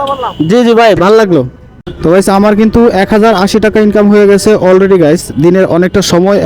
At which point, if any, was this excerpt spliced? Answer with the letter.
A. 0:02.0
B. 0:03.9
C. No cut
A